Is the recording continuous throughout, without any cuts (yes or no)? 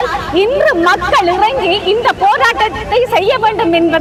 yes